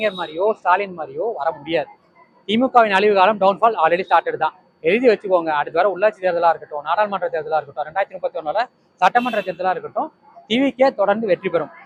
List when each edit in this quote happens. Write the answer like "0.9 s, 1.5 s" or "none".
none